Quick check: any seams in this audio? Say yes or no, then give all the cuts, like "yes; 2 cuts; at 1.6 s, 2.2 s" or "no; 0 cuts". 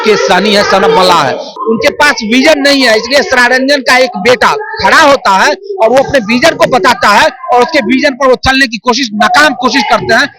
yes; 1 cut; at 1.6 s